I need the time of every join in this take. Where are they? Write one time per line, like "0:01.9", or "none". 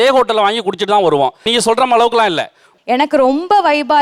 0:02.7